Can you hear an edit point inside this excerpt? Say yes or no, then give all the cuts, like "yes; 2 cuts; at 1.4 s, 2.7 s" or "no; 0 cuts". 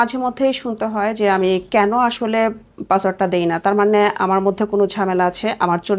no; 0 cuts